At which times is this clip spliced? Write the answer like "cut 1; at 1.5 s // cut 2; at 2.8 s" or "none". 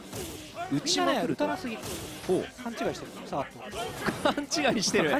none